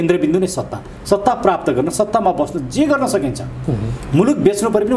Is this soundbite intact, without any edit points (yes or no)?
yes